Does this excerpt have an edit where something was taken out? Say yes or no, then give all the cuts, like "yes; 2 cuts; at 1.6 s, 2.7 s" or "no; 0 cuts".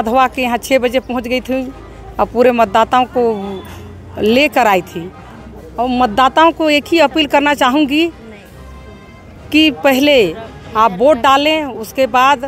no; 0 cuts